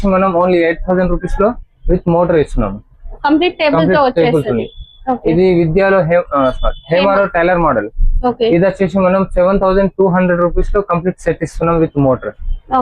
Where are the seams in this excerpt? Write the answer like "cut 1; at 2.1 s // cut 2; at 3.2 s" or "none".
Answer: none